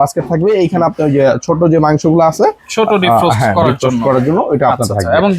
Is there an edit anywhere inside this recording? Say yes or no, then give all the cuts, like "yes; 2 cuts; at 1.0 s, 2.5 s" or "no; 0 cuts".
no; 0 cuts